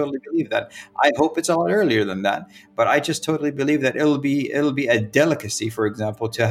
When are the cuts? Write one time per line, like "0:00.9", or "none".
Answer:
none